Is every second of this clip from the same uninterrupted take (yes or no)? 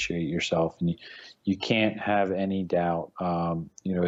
yes